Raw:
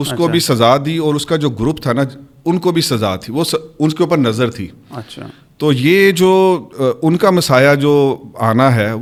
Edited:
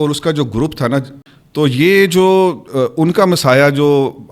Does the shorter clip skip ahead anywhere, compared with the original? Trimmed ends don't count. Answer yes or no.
yes